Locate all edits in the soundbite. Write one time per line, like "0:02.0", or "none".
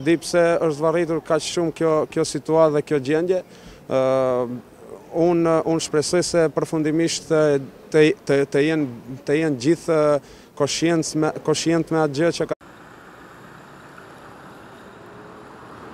none